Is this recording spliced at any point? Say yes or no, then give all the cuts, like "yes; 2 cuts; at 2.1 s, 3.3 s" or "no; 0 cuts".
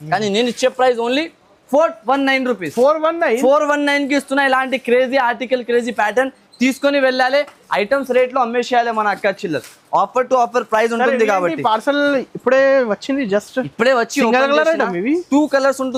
no; 0 cuts